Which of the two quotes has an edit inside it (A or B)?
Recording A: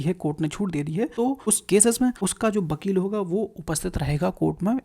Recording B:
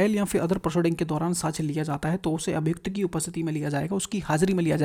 A